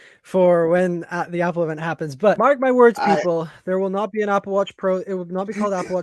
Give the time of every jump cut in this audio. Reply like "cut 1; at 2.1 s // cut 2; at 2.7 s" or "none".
cut 1; at 2.4 s